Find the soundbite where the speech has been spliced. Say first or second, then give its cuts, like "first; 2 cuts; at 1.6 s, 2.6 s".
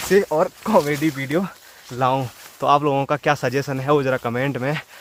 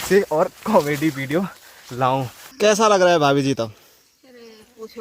second; 1 cut; at 2.4 s